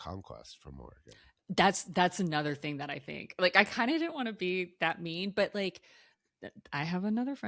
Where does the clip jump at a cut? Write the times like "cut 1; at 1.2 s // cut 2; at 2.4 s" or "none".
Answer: none